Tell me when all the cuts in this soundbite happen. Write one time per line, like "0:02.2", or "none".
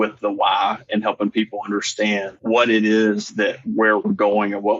0:02.3